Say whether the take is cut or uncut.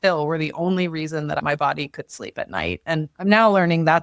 cut